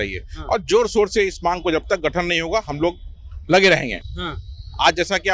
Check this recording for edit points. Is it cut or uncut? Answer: uncut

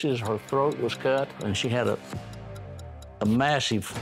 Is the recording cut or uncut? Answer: cut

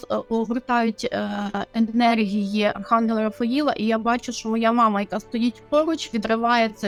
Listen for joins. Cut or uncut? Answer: uncut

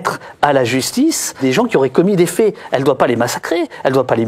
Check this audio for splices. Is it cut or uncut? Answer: cut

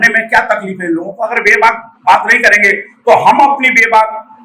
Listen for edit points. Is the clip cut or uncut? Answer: uncut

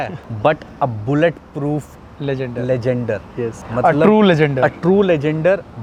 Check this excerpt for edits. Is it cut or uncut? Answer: uncut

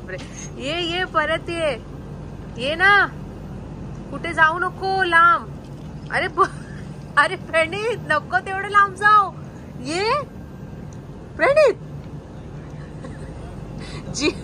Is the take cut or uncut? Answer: uncut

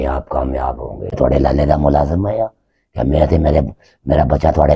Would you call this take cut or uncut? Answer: cut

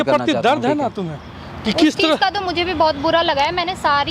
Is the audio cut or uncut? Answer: uncut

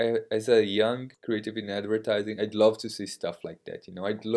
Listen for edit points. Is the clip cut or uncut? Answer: cut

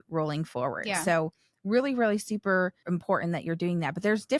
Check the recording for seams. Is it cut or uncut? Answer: cut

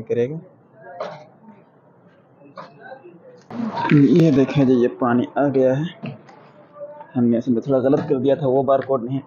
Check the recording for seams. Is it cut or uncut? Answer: uncut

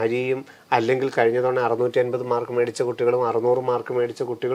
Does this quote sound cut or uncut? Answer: uncut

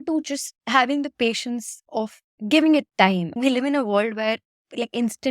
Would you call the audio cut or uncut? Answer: cut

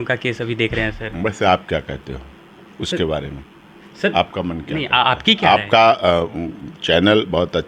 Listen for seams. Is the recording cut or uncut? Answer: uncut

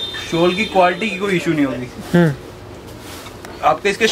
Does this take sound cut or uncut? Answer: uncut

